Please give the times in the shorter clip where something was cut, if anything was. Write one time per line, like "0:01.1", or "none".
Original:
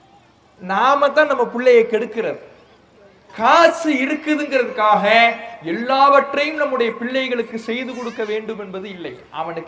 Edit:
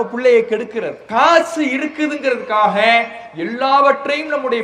0:01.0